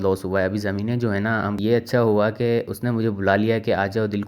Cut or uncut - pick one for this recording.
cut